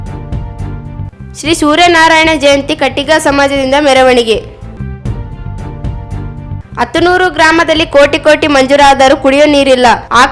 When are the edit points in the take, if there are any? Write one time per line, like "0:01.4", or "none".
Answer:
0:01.1
0:04.6
0:06.4